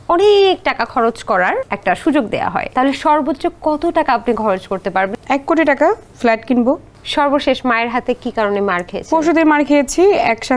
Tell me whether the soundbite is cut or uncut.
cut